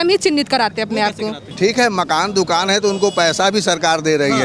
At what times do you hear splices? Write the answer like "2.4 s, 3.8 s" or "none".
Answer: 1.4 s